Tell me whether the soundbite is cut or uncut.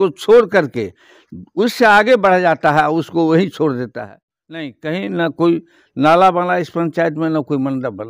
cut